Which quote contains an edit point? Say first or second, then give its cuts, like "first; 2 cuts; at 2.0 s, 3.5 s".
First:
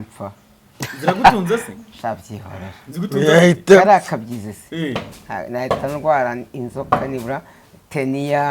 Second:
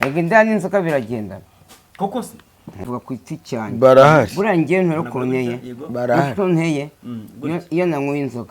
second; 1 cut; at 2.9 s